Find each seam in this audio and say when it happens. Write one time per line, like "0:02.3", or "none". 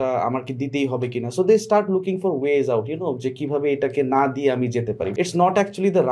0:05.1